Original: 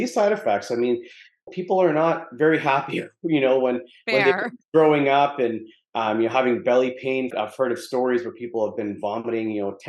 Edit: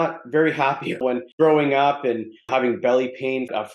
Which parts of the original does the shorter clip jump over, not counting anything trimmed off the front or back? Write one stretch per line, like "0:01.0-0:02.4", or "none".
0:03.2-0:04.5
0:05.8-0:06.3

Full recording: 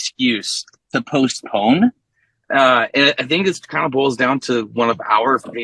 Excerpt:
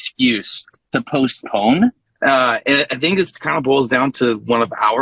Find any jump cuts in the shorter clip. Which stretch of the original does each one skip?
0:02.1-0:02.3

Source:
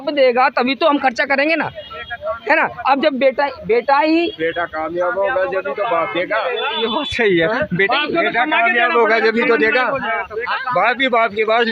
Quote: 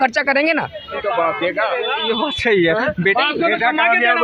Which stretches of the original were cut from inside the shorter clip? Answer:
0:02.0-0:05.7

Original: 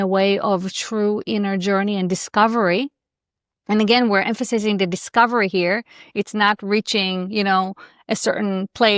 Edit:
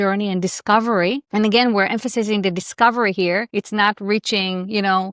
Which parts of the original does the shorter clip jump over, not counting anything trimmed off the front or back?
0:02.9-0:03.6
0:05.8-0:06.1

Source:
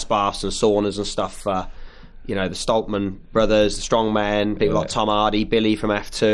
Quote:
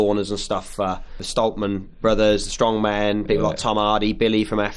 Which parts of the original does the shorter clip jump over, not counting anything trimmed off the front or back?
0:01.9-0:02.6

